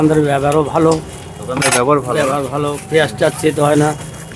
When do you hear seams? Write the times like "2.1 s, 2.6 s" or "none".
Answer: none